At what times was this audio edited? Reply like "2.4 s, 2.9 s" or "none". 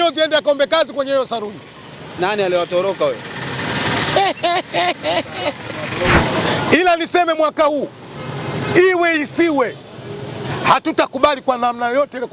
6.2 s